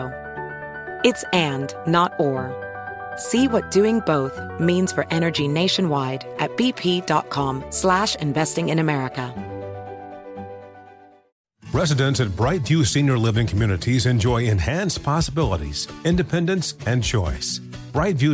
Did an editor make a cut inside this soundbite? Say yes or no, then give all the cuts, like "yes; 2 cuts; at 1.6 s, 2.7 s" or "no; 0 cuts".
yes; 1 cut; at 11.4 s